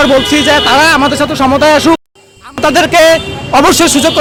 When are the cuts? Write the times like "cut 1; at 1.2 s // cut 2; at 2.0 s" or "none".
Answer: none